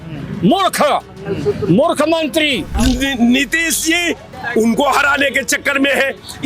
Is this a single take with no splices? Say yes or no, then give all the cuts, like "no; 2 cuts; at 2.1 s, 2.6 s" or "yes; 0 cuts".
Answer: no; 2 cuts; at 2.7 s, 4.3 s